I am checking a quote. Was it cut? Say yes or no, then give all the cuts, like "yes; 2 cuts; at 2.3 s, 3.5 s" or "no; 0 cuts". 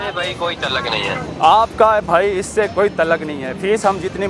no; 0 cuts